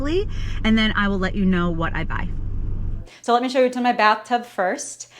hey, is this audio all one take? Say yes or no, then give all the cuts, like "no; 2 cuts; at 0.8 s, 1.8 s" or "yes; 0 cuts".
no; 1 cut; at 3.2 s